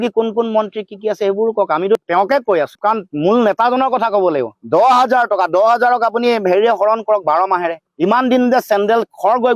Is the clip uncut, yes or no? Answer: no